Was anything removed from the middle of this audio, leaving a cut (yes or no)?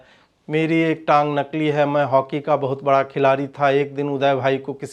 no